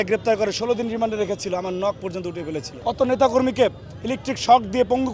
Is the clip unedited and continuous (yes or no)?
no